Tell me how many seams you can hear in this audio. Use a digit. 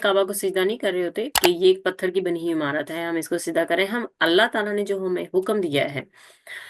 1